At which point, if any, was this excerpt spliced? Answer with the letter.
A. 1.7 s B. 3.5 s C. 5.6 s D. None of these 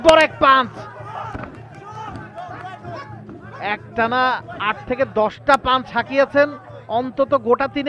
D